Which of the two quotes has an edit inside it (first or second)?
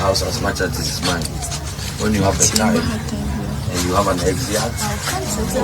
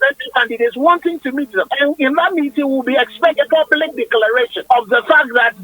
second